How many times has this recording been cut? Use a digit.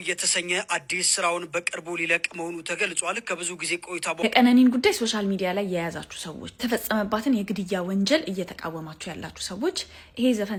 0